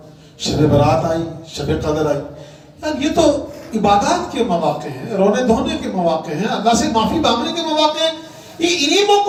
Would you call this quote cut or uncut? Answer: uncut